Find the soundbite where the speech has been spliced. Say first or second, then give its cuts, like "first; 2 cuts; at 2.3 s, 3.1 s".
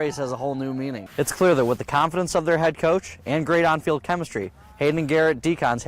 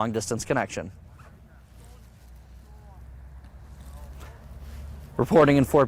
first; 1 cut; at 1.0 s